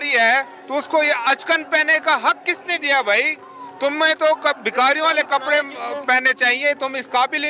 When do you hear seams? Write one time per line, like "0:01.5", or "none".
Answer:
none